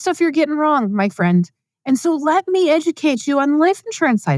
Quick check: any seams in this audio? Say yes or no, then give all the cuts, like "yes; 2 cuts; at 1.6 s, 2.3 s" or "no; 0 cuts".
no; 0 cuts